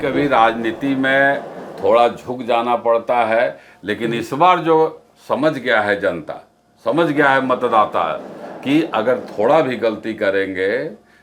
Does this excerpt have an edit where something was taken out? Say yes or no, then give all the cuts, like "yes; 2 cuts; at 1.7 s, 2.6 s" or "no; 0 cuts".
no; 0 cuts